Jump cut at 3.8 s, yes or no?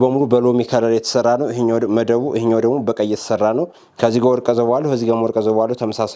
yes